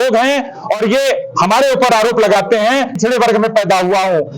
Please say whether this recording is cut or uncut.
cut